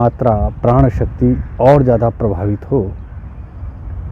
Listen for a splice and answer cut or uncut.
uncut